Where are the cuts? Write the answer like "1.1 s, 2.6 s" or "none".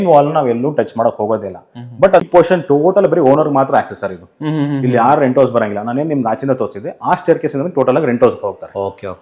2.2 s